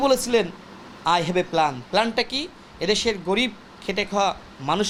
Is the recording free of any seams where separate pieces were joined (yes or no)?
yes